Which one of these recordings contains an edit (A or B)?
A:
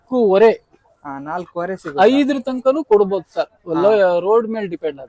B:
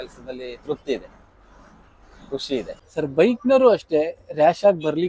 B